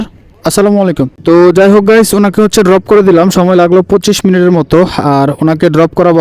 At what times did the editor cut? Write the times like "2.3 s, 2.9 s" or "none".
1.1 s